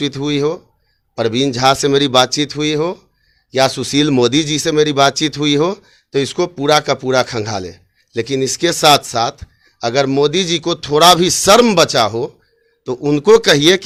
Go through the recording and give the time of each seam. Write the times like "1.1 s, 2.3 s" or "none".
none